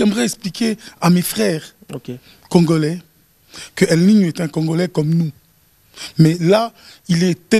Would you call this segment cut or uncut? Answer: uncut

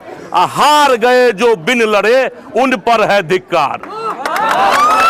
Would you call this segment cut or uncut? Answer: uncut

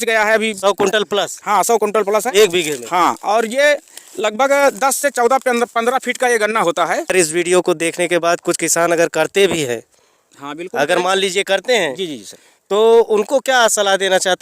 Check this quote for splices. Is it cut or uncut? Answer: cut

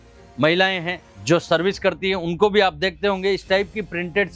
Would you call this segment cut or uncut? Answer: uncut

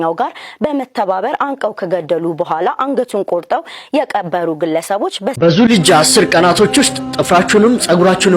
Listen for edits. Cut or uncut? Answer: cut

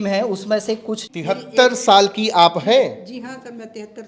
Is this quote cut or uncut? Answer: cut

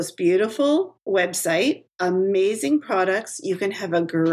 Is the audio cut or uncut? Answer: cut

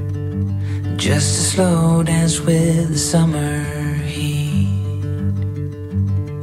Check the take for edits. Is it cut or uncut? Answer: uncut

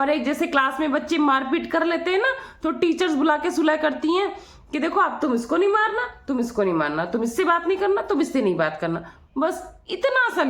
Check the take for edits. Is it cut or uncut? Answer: uncut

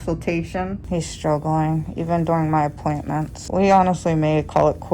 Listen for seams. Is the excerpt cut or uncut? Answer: cut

